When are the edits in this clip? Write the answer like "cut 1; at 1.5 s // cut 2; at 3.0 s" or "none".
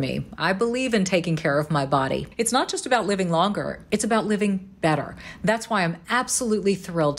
cut 1; at 2.2 s